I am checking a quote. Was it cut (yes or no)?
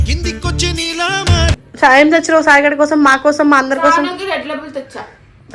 yes